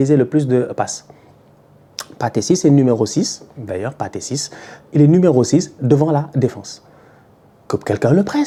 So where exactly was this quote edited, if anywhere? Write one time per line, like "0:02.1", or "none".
none